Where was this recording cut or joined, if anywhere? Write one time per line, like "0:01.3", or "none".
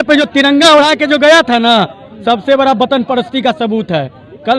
none